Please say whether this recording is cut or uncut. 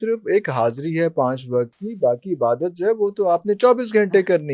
uncut